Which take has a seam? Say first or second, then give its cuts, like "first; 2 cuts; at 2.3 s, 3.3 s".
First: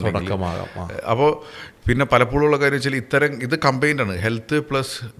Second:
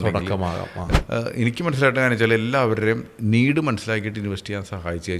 second; 1 cut; at 0.9 s